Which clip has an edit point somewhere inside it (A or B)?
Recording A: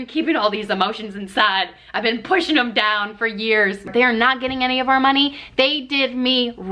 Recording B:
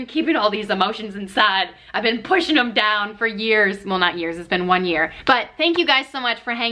A